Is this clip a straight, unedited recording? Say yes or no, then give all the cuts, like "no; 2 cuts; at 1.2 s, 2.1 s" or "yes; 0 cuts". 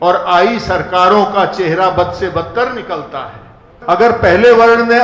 no; 1 cut; at 3.7 s